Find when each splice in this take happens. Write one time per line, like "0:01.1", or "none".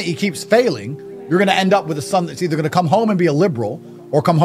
none